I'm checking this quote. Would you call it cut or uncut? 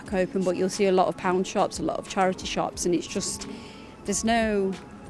uncut